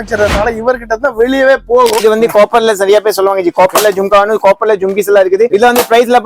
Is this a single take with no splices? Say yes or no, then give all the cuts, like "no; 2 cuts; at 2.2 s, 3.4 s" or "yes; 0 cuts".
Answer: no; 2 cuts; at 2.0 s, 5.5 s